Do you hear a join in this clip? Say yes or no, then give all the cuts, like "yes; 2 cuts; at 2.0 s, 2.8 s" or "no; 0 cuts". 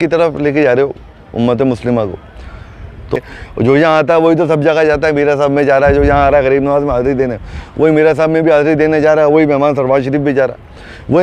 yes; 1 cut; at 3.2 s